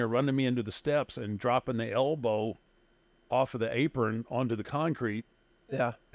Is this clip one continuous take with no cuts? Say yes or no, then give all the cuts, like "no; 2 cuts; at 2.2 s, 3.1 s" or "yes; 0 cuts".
yes; 0 cuts